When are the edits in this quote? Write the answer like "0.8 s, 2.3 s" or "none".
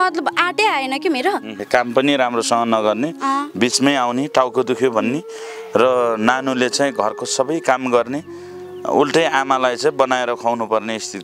1.6 s

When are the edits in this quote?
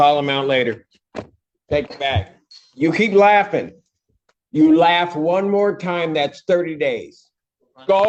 none

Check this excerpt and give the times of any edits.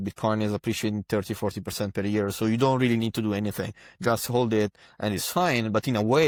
none

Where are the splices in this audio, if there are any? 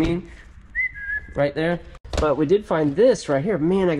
2.0 s

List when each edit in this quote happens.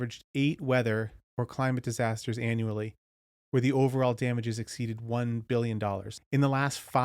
6.1 s

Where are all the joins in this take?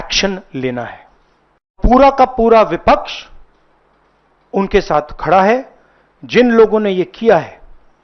1.8 s

